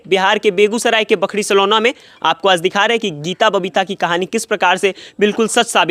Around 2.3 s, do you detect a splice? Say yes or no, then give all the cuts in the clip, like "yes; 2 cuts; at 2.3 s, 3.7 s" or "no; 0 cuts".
no; 0 cuts